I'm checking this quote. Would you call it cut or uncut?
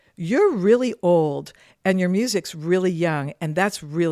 uncut